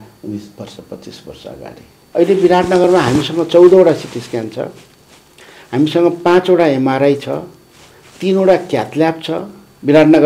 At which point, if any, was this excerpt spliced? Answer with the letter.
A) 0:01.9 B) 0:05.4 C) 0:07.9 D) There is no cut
A